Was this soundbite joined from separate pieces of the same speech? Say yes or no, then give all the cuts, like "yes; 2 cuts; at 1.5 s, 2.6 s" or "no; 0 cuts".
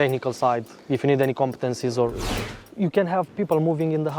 yes; 1 cut; at 2.2 s